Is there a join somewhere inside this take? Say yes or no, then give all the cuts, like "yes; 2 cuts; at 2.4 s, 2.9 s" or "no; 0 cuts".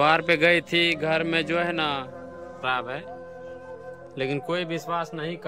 yes; 1 cut; at 2.5 s